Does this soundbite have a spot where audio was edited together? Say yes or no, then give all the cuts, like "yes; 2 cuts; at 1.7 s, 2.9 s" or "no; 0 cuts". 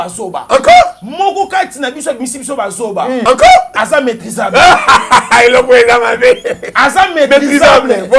yes; 1 cut; at 3.2 s